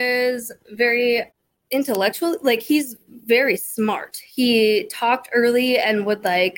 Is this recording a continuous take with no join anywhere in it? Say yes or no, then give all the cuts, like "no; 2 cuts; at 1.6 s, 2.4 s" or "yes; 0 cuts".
yes; 0 cuts